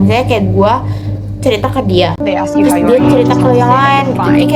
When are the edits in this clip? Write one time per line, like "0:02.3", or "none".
none